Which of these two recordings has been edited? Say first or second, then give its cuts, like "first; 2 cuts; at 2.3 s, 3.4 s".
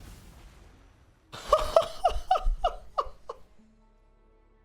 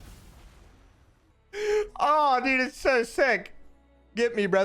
second; 1 cut; at 1.2 s